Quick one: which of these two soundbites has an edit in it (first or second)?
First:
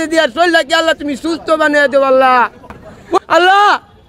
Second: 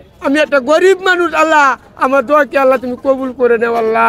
first